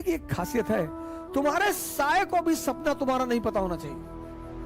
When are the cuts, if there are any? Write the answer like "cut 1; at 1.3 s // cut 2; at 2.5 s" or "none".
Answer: none